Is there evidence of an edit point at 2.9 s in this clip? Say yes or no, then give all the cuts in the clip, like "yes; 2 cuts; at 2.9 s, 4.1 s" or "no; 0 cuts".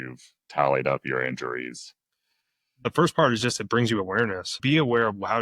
yes; 2 cuts; at 2.9 s, 4.6 s